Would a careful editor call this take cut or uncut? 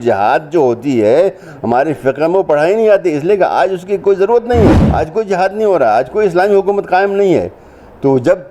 cut